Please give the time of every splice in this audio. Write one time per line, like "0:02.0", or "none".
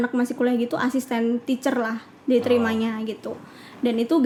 none